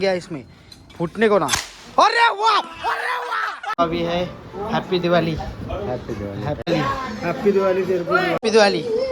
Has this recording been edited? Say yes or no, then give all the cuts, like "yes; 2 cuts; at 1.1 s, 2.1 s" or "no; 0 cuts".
yes; 3 cuts; at 3.8 s, 6.7 s, 8.4 s